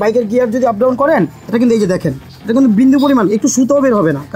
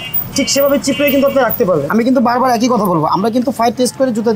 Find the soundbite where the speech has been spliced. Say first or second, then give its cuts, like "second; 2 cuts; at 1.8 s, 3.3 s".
second; 1 cut; at 1.9 s